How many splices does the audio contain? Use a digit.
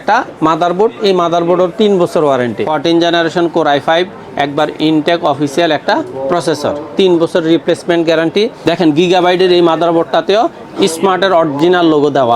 2